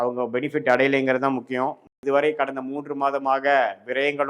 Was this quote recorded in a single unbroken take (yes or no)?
no